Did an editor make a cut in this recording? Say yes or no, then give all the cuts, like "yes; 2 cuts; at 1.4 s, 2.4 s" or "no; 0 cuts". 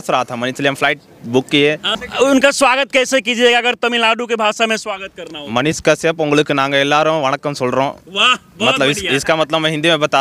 yes; 1 cut; at 2.0 s